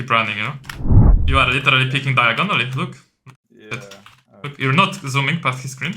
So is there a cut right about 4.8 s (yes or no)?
no